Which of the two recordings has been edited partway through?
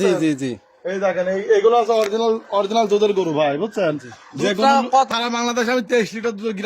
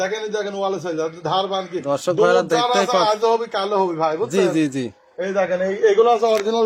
first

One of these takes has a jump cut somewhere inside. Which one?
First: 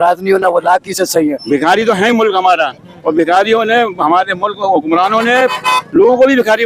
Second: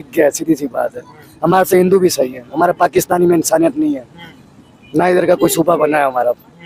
first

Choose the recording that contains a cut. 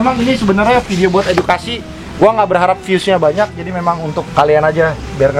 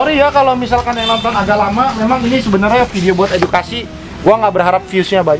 first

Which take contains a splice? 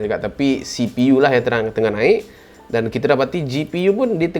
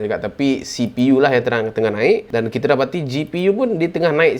second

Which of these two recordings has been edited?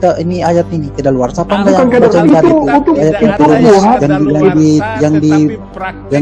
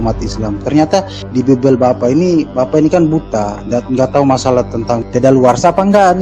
second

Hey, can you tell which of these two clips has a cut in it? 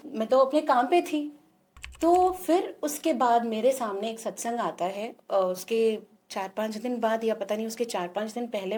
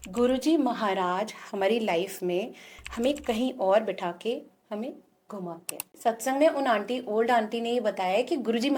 second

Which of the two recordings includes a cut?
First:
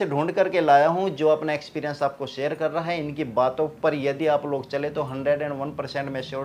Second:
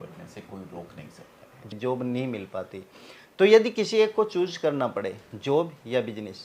second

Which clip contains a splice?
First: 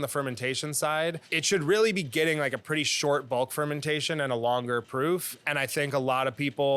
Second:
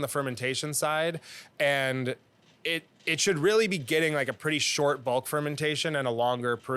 first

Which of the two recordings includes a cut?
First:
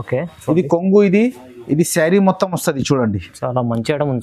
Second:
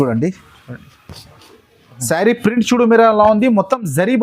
second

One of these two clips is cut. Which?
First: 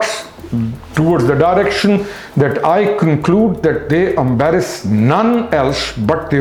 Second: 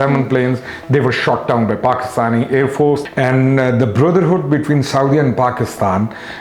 second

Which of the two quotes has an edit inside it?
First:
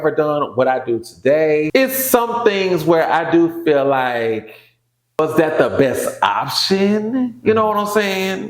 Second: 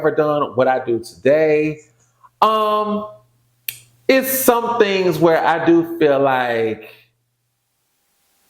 first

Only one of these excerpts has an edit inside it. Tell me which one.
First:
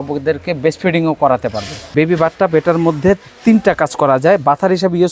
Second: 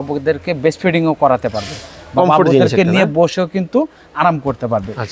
first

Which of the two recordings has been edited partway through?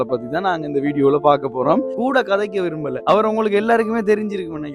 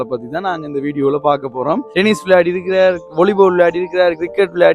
second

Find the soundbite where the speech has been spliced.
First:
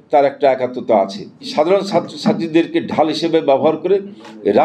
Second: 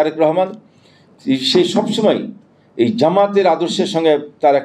first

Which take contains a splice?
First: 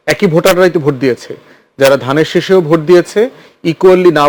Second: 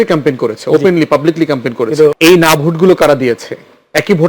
second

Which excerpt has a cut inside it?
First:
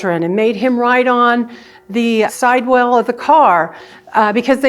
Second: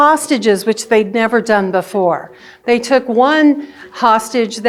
first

